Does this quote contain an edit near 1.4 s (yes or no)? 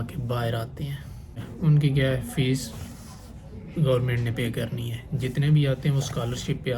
yes